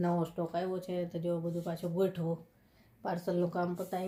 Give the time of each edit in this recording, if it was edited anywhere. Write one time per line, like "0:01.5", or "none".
none